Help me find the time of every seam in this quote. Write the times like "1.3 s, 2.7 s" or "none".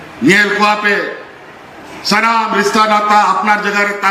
none